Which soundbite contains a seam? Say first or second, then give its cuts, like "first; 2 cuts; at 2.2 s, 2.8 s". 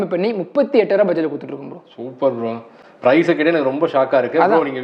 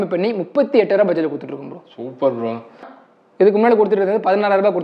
second; 1 cut; at 2.9 s